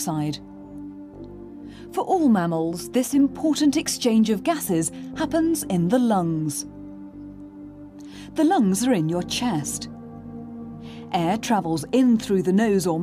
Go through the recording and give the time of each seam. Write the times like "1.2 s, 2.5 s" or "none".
none